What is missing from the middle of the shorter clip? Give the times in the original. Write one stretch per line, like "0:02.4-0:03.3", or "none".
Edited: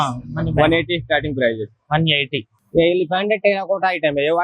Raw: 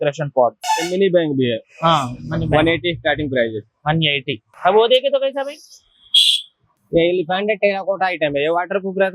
0:04.5-0:06.7